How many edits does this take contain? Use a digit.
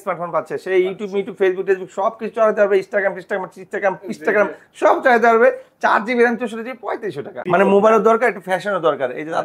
1